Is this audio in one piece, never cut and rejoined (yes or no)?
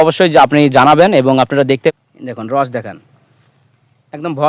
no